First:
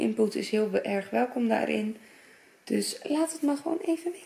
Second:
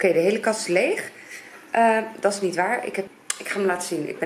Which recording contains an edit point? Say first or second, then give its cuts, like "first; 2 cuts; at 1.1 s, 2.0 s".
second; 1 cut; at 3.1 s